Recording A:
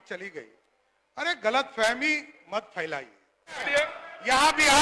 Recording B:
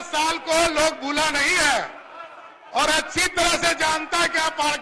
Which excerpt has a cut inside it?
A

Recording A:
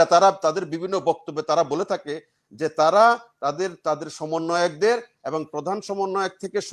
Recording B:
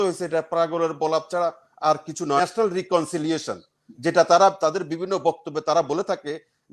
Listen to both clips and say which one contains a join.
B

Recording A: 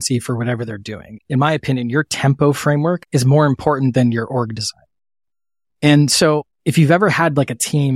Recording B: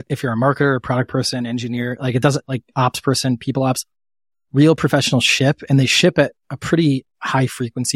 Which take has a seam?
A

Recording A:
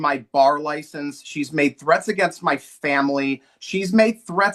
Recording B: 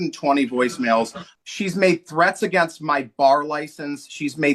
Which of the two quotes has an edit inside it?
B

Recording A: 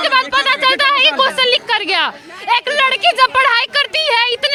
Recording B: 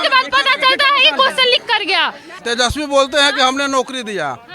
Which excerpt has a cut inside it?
B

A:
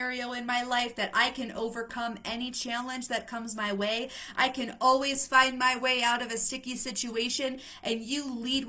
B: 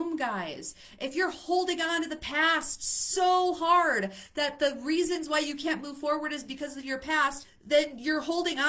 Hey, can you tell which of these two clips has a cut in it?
B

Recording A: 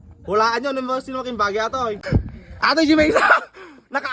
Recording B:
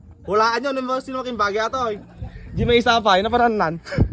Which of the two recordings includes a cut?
A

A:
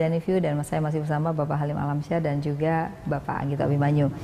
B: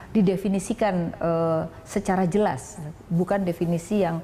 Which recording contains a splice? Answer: B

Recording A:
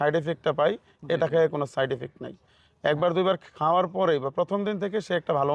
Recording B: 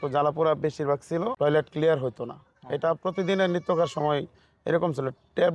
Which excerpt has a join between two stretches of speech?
B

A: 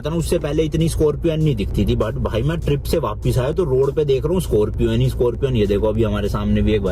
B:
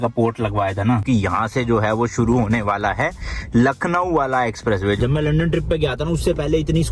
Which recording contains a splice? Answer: B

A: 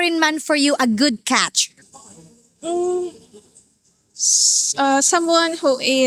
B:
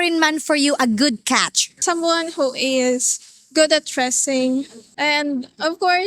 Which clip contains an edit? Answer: B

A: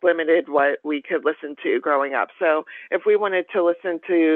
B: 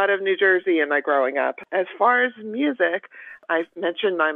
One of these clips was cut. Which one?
B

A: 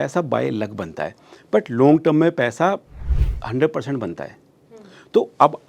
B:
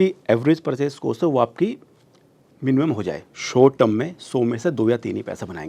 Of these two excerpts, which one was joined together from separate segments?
B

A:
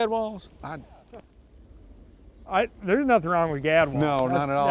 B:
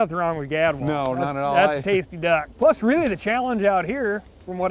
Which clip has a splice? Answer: B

